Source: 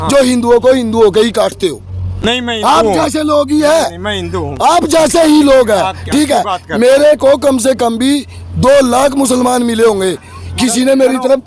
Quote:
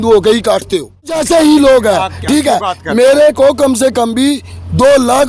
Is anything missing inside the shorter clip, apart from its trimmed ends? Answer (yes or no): yes